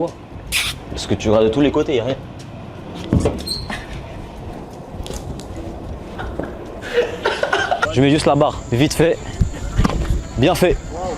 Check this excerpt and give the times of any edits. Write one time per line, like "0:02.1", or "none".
0:06.2
0:07.9